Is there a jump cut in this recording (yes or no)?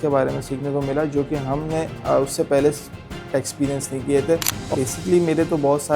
yes